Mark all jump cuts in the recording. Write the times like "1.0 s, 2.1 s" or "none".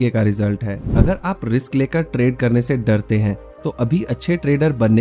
0.9 s